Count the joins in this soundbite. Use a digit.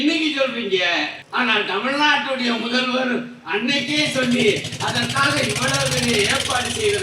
1